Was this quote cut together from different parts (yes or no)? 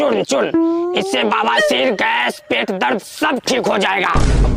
no